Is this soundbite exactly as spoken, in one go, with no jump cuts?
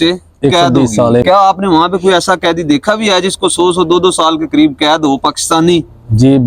no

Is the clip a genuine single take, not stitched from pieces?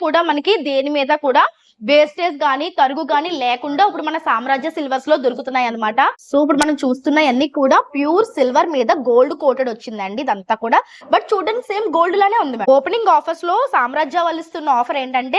no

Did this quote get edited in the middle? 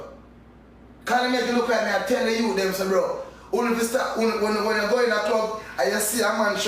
no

